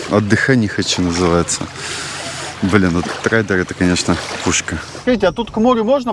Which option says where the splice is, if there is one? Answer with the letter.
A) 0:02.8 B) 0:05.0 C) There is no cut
B